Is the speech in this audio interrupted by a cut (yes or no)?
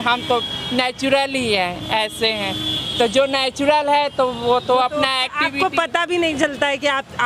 no